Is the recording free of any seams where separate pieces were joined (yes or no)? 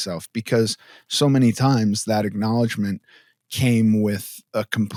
yes